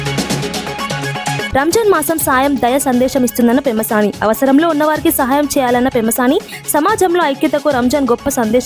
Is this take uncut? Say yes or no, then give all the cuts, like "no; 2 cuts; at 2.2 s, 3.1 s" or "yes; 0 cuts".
no; 1 cut; at 1.5 s